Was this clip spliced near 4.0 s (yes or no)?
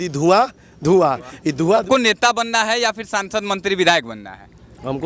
no